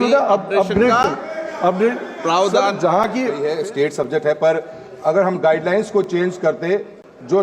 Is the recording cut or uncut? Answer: cut